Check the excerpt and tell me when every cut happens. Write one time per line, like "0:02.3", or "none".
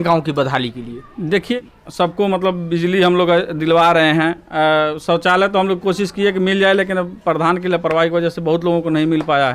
0:01.5